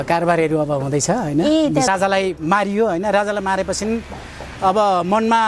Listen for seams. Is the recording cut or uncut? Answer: cut